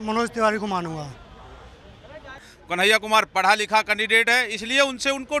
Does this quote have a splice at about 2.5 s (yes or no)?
yes